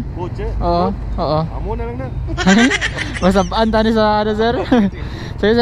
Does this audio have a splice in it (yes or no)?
no